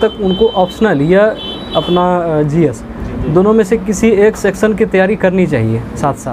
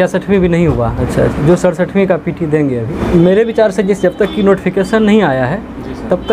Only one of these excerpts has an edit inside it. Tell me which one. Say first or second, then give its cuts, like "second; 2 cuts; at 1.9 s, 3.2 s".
second; 2 cuts; at 1.0 s, 2.9 s